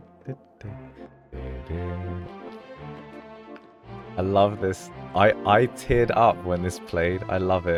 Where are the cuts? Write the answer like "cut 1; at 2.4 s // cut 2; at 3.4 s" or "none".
none